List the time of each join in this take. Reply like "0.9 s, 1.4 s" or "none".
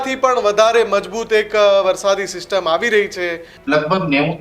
3.5 s